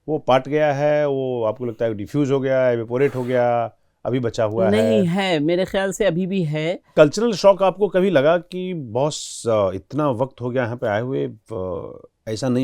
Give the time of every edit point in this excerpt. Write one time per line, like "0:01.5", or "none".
0:06.9